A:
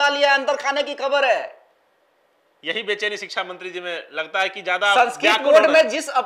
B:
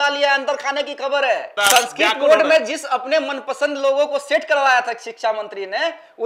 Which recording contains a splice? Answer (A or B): B